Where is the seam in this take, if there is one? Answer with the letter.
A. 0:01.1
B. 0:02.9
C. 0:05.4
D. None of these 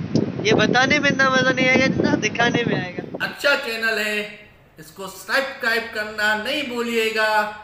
B